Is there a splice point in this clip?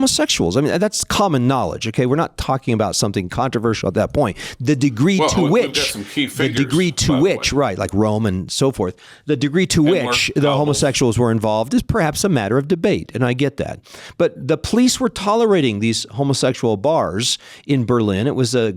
no; 0 cuts

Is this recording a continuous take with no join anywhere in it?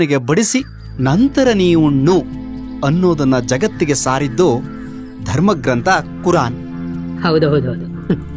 yes; 0 cuts

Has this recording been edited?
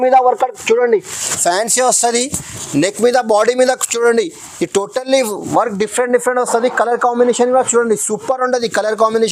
no; 0 cuts

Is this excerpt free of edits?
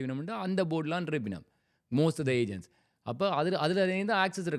yes; 0 cuts

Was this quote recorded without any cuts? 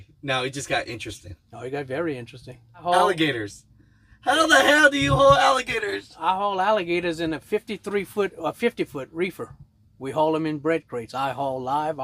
no; 1 cut; at 2.8 s

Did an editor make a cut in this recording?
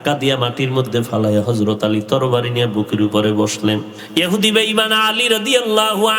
yes; 1 cut; at 4.0 s

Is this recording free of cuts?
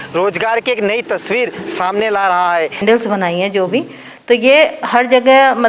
no; 1 cut; at 2.8 s

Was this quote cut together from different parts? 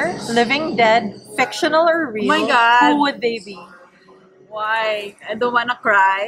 no; 0 cuts

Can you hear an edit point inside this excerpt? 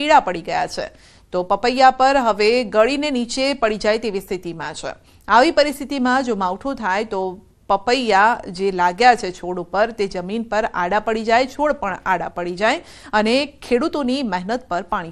yes; 1 cut; at 4.3 s

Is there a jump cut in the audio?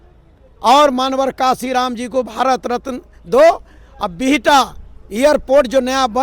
no; 0 cuts

